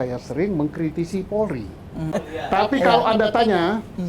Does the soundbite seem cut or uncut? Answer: cut